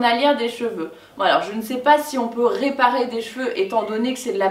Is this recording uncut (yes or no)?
yes